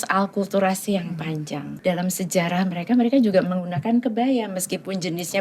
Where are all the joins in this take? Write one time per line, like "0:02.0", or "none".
0:01.7